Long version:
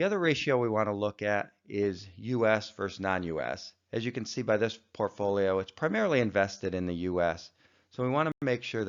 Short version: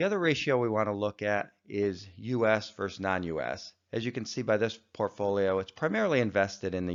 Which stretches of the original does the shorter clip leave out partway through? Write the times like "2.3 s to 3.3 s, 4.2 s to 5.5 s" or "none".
none